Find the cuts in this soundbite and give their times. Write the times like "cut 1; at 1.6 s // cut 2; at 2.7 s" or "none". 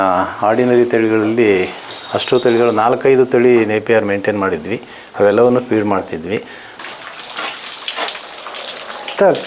cut 1; at 6.7 s